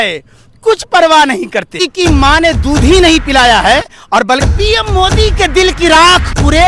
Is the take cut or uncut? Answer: cut